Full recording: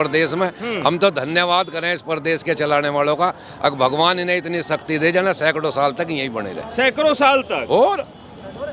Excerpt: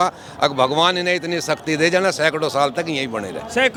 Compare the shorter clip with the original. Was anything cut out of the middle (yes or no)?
no